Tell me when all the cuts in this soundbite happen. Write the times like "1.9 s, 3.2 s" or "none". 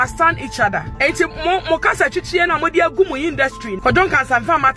0.9 s, 3.7 s